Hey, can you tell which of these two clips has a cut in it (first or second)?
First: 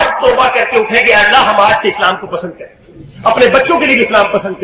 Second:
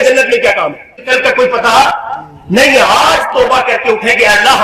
second